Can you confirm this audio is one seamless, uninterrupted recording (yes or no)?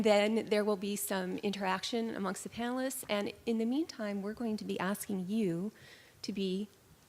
no